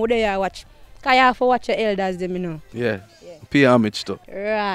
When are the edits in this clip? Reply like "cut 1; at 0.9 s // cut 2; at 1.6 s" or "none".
none